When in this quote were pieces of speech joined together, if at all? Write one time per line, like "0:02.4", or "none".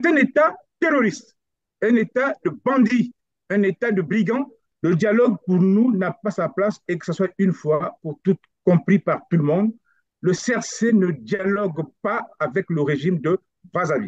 0:04.6